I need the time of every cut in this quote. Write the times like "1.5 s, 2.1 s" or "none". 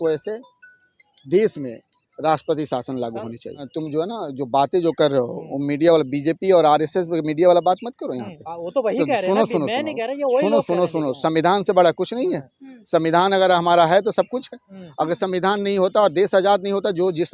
3.7 s

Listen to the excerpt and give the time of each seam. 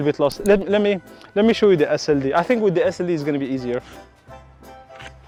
none

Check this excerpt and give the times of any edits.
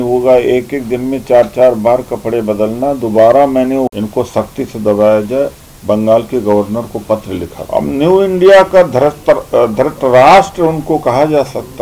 4.0 s, 7.6 s

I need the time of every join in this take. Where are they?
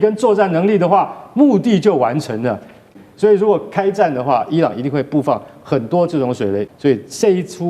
2.9 s, 6.7 s

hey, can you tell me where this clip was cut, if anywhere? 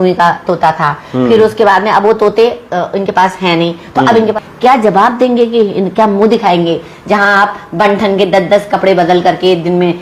4.3 s

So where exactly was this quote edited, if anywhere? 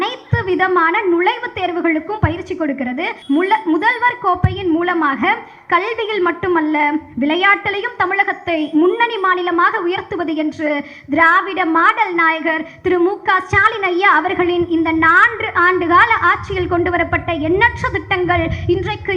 3.2 s

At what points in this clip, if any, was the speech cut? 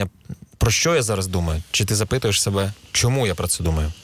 none

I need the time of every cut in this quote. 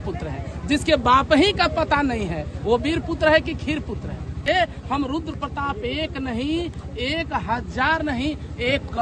4.4 s

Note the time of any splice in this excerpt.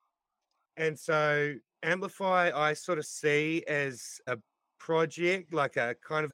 none

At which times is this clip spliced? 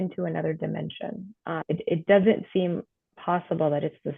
1.6 s

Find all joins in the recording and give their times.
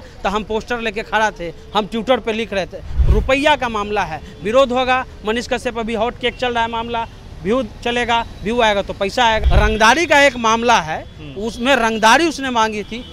2.8 s, 9.4 s

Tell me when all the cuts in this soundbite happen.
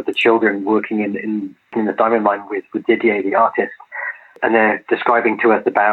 none

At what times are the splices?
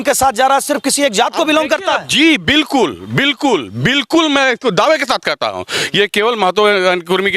none

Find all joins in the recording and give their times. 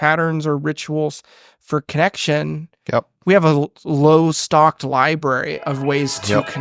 none

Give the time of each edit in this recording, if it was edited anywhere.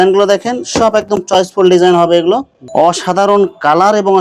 2.5 s

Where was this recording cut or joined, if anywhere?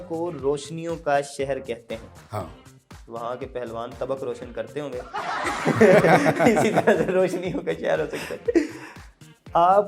none

